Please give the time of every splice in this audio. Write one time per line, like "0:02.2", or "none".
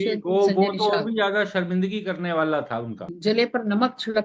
0:03.1